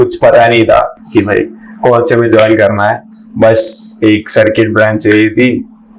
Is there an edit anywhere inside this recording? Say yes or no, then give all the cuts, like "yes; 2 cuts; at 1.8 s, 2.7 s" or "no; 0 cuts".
no; 0 cuts